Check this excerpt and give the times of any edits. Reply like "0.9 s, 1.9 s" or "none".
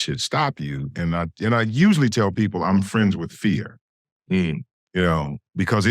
4.7 s